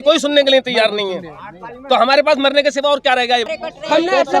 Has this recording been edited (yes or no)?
yes